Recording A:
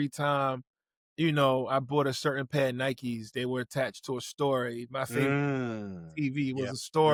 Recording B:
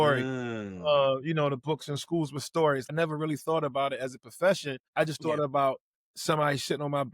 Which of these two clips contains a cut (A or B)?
B